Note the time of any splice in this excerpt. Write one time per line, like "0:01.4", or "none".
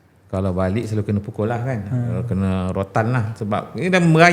none